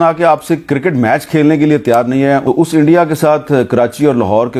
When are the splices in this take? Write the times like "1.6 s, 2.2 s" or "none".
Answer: 2.4 s

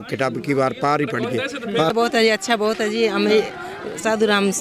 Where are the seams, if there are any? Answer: 1.9 s

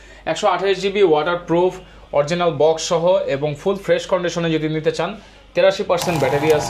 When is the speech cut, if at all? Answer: none

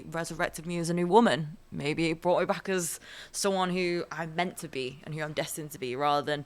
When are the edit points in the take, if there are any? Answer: none

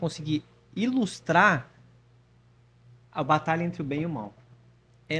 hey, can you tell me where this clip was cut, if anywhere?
none

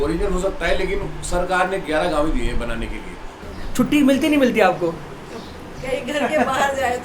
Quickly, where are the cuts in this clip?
3.3 s

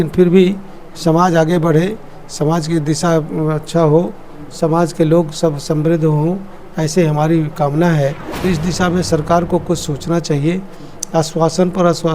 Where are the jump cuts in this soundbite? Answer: 8.3 s

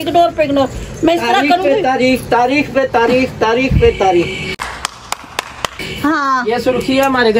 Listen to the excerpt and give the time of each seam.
none

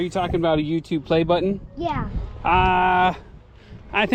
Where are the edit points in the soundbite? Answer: none

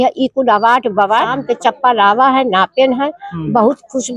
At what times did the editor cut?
1.4 s

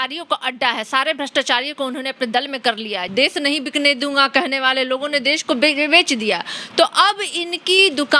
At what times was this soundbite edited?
3.0 s

